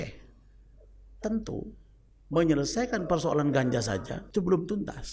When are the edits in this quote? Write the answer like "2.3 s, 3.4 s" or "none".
4.2 s